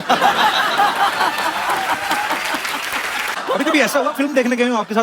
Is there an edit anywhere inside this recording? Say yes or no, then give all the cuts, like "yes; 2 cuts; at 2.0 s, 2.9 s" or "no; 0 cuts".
yes; 1 cut; at 3.4 s